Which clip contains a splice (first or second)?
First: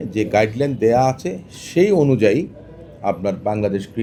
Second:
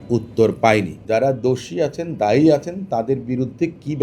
second